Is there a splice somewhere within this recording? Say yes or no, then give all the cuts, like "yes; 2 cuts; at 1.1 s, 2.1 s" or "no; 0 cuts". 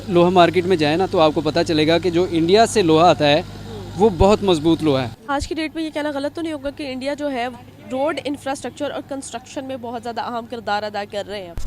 yes; 2 cuts; at 5.2 s, 7.6 s